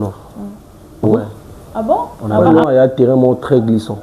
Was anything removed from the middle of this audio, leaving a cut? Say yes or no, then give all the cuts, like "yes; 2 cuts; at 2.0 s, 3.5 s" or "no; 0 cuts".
yes; 1 cut; at 1.1 s